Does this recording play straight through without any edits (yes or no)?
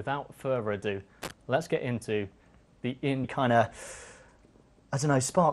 yes